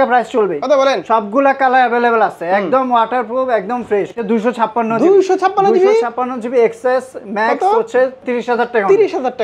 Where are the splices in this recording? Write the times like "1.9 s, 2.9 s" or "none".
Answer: 4.2 s, 8.2 s